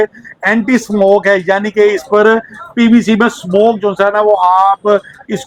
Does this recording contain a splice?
no; 0 cuts

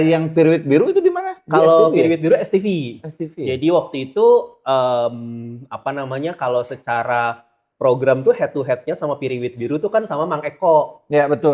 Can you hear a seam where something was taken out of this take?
no; 0 cuts

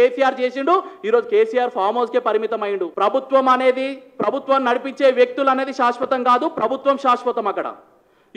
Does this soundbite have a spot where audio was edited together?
yes; 1 cut; at 2.9 s

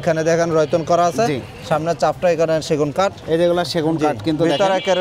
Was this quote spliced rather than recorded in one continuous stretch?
no; 0 cuts

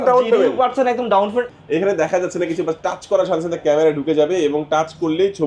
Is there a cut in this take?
yes; 1 cut; at 1.5 s

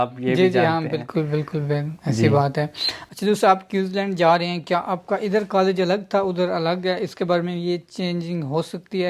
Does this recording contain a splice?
no; 0 cuts

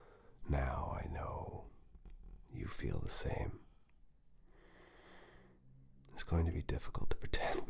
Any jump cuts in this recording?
no; 0 cuts

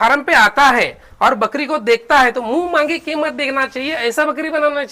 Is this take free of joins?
yes; 0 cuts

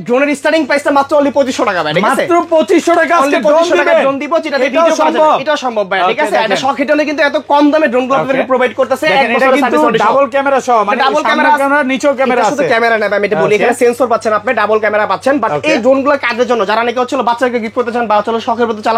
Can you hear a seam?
no; 0 cuts

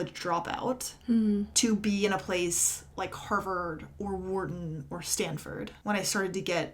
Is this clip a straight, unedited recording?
no; 2 cuts; at 1.5 s, 5.7 s

